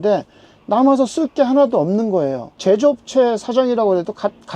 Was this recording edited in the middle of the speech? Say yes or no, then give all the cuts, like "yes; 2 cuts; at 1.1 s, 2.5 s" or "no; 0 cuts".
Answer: yes; 1 cut; at 2.5 s